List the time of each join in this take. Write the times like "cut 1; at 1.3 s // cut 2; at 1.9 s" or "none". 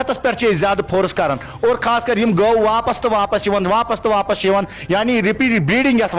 none